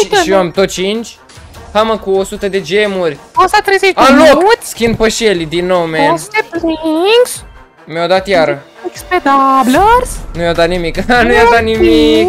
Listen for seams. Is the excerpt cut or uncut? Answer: uncut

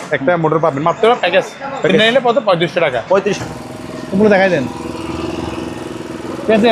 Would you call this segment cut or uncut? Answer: cut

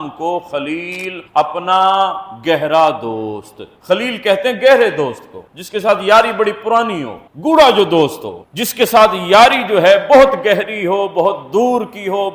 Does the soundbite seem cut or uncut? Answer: uncut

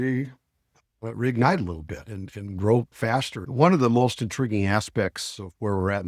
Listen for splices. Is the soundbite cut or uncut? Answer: cut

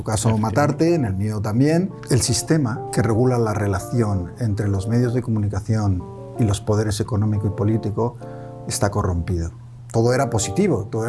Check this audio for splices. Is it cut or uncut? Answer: cut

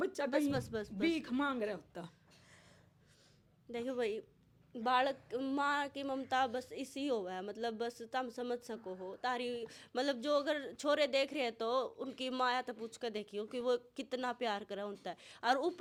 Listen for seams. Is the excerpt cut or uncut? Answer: uncut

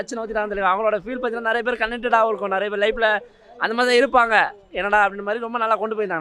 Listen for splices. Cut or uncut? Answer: uncut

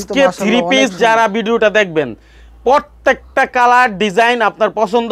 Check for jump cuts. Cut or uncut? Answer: uncut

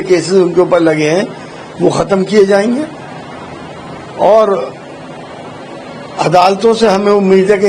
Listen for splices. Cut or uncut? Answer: uncut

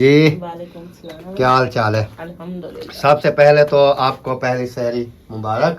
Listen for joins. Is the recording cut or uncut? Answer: uncut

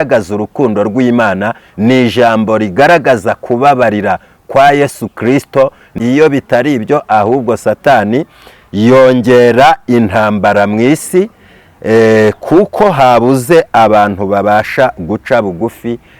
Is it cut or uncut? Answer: cut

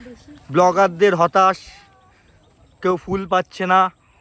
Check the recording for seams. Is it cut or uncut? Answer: uncut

